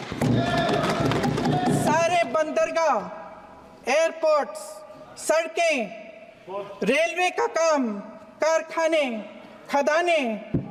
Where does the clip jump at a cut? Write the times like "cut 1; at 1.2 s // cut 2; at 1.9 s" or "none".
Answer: none